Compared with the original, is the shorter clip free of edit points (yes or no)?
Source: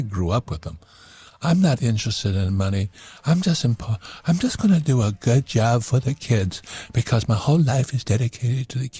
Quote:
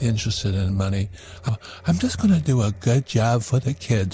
no